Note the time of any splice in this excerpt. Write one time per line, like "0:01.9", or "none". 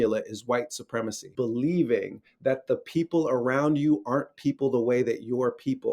0:01.2